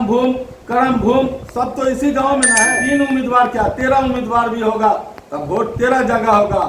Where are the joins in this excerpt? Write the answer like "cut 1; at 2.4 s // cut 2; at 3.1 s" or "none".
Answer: cut 1; at 2.7 s